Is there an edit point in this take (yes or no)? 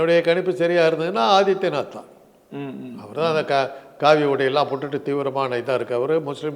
no